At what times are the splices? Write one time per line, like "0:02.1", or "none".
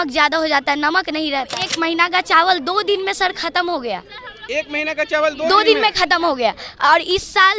0:01.6